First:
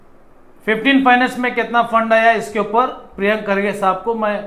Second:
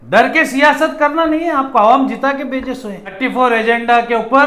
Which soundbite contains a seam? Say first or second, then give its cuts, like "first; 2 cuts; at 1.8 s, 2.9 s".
second; 1 cut; at 3.1 s